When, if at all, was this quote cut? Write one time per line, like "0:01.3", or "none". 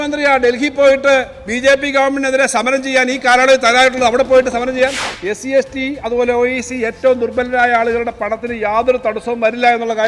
0:05.1